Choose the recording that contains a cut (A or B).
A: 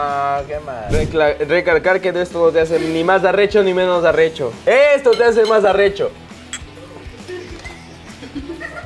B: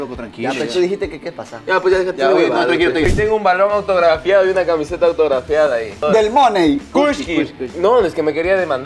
B